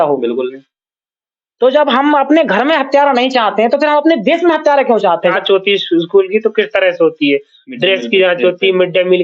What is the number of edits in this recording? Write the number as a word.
one